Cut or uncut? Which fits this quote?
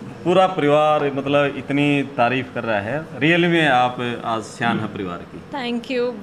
uncut